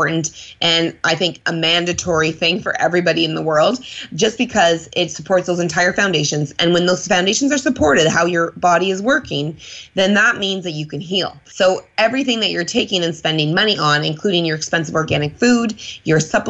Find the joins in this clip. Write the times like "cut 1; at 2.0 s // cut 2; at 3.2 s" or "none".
cut 1; at 11.4 s